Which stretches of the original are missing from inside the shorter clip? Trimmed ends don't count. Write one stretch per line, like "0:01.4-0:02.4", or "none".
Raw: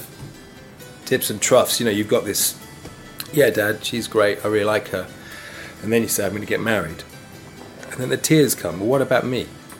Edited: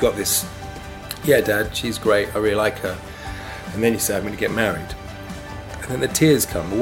none